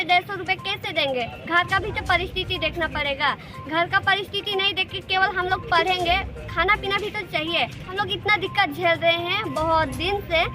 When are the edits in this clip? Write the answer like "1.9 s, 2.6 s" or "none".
7.8 s